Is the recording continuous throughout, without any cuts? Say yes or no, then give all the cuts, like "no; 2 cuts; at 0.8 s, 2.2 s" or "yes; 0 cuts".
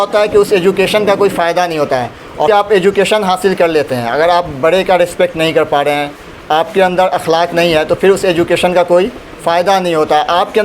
no; 1 cut; at 2.5 s